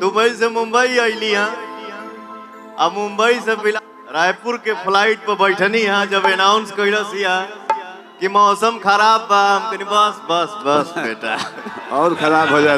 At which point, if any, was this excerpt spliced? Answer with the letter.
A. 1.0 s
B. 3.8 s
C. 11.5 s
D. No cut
B